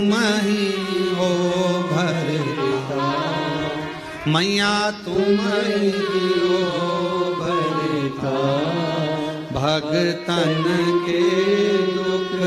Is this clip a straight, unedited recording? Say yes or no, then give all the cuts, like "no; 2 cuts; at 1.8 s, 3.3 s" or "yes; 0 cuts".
yes; 0 cuts